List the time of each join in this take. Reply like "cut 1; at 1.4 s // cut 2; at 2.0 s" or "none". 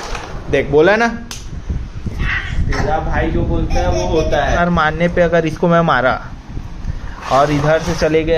cut 1; at 4.6 s